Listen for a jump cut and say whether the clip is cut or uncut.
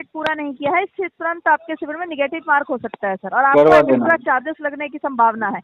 uncut